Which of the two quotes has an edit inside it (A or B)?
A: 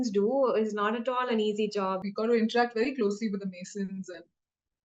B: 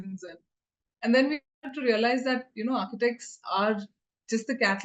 A